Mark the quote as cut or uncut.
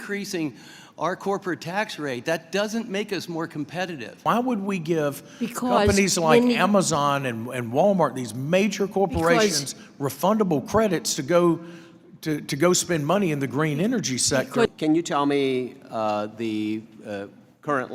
cut